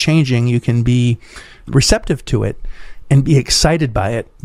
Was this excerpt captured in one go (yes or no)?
yes